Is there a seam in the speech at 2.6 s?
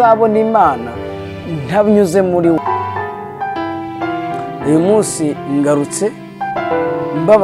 yes; 1 cut; at 2.6 s

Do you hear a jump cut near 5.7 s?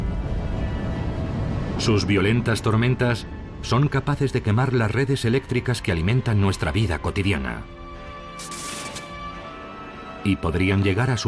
no; 0 cuts

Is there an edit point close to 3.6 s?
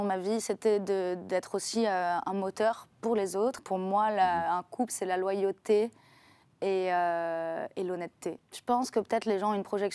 yes; 2 cuts; at 3.6 s, 8.5 s

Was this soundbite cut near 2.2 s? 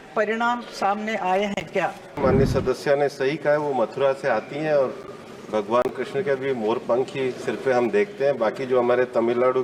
yes; 1 cut; at 2.2 s

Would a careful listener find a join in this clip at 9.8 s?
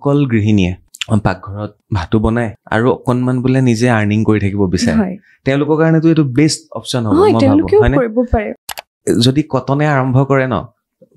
no; 4 cuts; at 0.8 s, 1.8 s, 2.6 s, 8.6 s

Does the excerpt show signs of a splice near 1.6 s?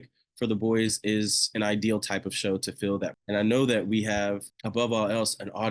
no; 2 cuts; at 3.2 s, 4.5 s

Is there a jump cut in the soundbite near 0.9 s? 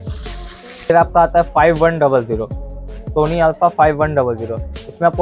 yes; 1 cut; at 0.9 s

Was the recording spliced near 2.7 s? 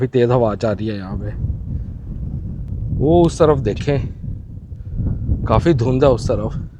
yes; 1 cut; at 2.7 s

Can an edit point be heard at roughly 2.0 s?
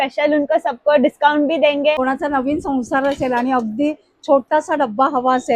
yes; 1 cut; at 2.0 s

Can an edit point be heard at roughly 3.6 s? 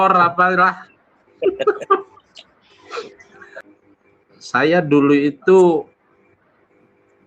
yes; 1 cut; at 3.6 s

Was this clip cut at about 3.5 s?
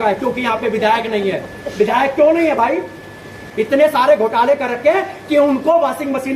yes; 1 cut; at 3.5 s

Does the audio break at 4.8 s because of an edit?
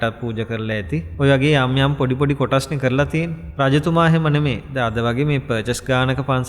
no; 2 cuts; at 1.1 s, 3.4 s

